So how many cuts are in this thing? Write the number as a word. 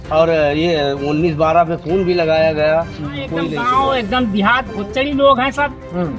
one